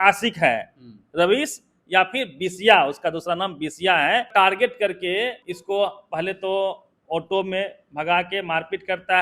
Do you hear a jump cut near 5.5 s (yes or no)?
yes